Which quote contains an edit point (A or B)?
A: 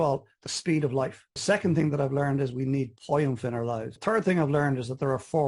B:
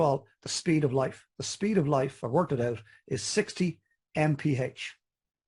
A